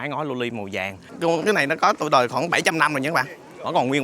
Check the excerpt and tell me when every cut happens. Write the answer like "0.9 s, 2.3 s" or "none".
1.0 s